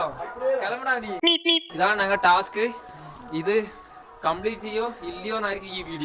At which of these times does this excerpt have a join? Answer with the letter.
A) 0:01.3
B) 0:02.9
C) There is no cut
A